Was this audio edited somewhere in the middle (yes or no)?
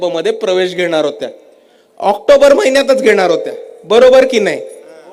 no